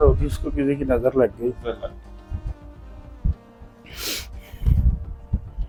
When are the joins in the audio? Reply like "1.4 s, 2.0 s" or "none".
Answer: none